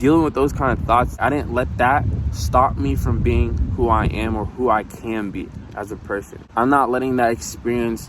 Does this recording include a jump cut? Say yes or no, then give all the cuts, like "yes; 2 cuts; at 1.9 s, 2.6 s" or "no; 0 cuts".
yes; 2 cuts; at 1.1 s, 6.4 s